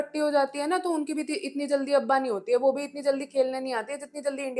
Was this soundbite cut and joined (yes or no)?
no